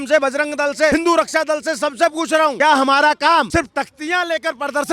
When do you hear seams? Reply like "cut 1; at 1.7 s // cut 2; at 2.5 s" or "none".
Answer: cut 1; at 0.9 s // cut 2; at 2.5 s // cut 3; at 3.5 s